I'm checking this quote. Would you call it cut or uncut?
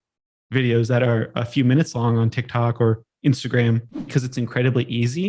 cut